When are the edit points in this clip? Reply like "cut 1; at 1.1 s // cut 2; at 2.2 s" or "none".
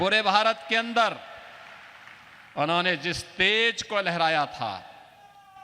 none